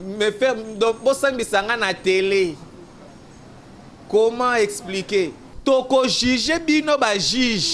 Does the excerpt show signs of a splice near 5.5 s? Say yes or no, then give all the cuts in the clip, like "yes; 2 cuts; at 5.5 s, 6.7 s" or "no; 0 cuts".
yes; 1 cut; at 5.5 s